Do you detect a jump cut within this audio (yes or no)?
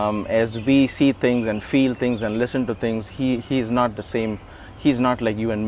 no